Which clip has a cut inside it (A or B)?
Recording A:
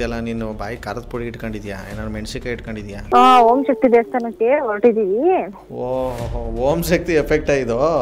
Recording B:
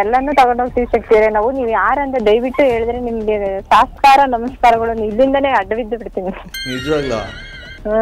A